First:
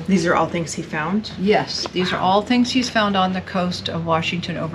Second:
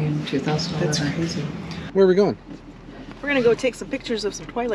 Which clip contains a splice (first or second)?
second